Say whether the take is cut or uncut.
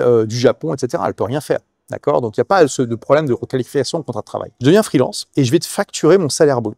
cut